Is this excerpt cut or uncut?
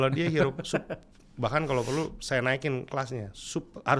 uncut